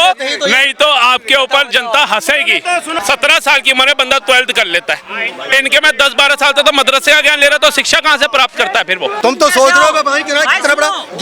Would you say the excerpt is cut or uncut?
cut